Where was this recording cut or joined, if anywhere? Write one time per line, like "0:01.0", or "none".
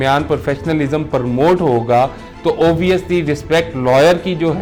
none